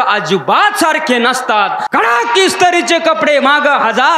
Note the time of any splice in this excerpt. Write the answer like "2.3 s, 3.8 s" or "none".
1.8 s